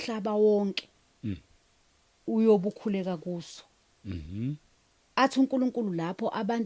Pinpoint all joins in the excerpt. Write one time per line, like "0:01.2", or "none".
none